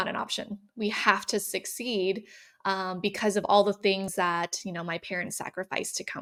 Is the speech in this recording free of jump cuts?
yes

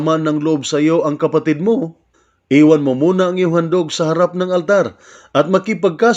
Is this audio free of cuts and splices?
no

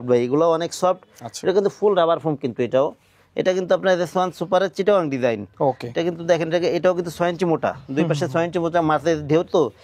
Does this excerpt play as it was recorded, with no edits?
yes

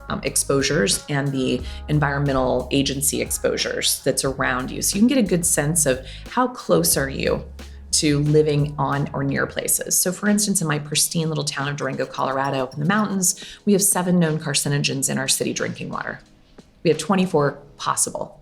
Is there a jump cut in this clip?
no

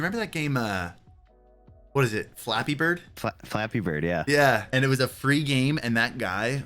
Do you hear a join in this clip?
yes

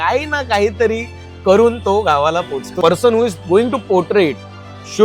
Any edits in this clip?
yes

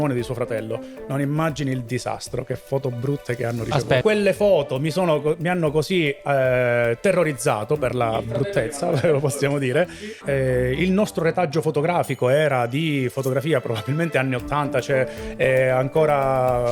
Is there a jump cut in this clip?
yes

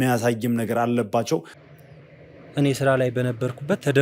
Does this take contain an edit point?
yes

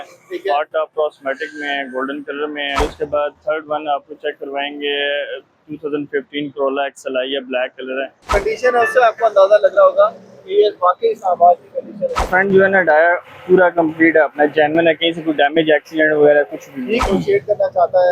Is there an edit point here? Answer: yes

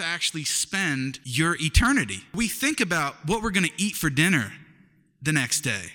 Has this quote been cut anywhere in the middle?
yes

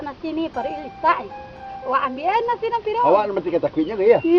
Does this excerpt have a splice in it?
yes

